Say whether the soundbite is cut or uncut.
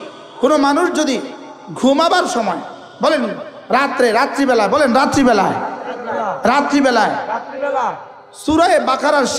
uncut